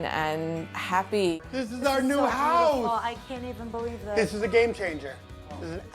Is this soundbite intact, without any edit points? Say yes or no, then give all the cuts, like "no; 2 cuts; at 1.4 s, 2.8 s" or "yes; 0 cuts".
no; 1 cut; at 1.3 s